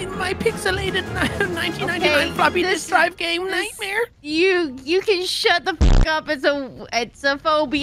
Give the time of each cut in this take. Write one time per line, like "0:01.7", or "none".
none